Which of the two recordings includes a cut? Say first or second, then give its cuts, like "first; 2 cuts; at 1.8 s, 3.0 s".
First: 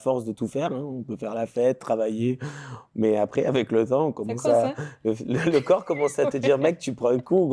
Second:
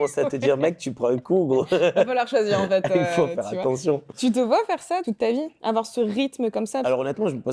second; 2 cuts; at 5.1 s, 6.8 s